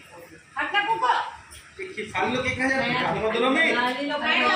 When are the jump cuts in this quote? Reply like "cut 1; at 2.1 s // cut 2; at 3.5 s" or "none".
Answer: none